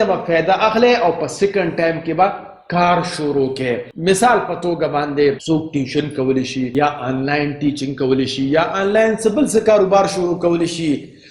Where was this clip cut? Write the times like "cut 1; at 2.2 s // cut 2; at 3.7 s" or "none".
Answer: none